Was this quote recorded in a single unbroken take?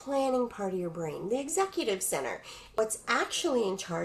no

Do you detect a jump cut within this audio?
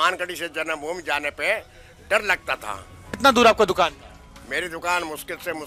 yes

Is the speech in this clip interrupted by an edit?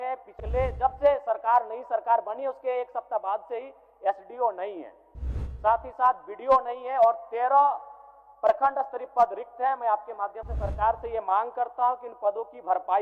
no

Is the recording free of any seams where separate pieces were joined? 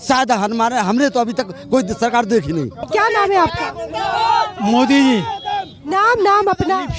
no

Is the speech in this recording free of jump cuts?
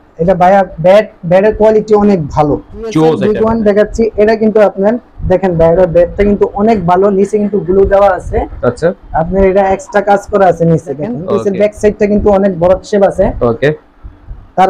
no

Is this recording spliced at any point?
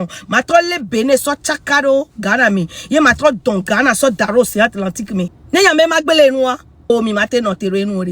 yes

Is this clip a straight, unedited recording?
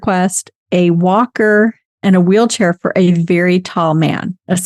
yes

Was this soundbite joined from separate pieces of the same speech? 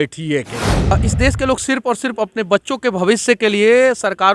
yes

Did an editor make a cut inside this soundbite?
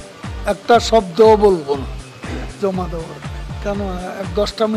yes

